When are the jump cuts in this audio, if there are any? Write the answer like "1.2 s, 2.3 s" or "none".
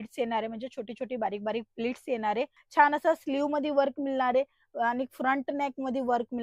2.6 s

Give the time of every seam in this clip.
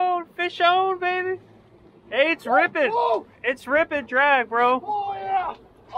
none

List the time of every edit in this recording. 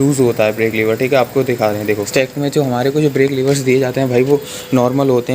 2.1 s

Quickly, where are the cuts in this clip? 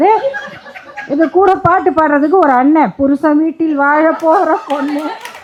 none

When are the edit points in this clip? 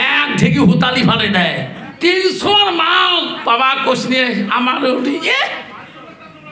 1.9 s

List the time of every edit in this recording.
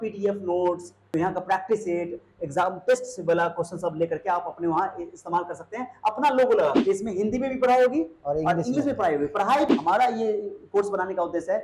1.1 s, 6.8 s, 9.7 s

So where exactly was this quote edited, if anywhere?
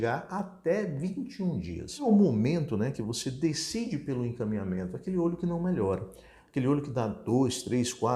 2.0 s

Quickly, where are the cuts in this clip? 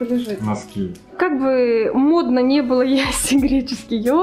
1.1 s

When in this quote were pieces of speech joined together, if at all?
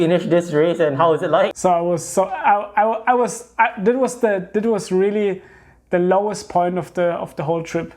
1.5 s

